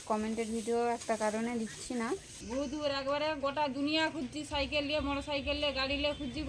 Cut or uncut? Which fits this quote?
cut